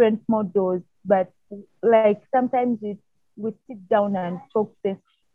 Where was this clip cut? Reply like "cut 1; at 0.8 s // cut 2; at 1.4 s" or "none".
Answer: none